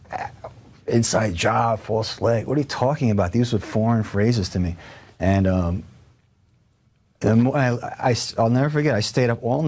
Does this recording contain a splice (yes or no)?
yes